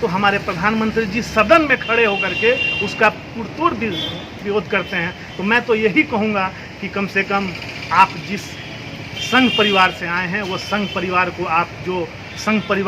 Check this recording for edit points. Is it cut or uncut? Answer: uncut